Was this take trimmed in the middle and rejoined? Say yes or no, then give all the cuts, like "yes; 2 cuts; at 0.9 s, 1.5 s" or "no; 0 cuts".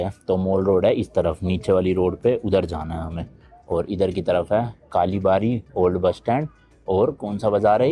no; 0 cuts